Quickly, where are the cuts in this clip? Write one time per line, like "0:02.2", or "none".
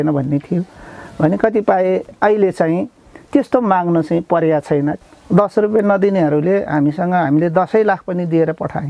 0:05.0

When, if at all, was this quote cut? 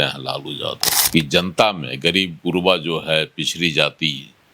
0:01.0

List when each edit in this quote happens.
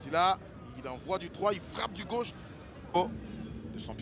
0:02.8

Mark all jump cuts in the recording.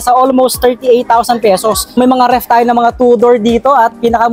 0:01.9

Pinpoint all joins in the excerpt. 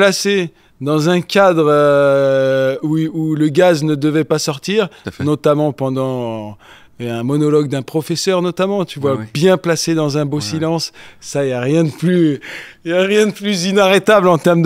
none

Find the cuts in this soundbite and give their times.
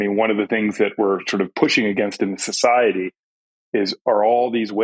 none

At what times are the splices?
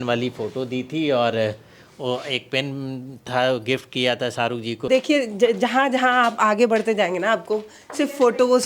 0:04.9

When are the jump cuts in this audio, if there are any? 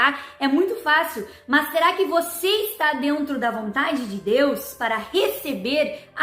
none

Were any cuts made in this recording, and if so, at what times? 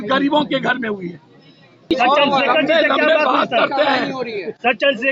0:01.9

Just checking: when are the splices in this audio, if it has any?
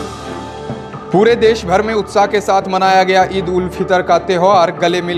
none

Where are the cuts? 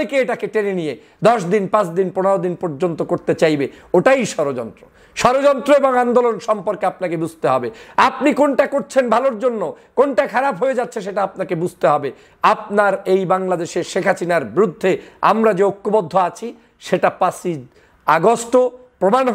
none

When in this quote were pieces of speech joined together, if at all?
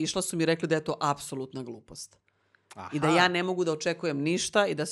none

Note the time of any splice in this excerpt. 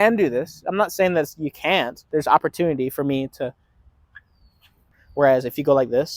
0:02.0
0:05.0

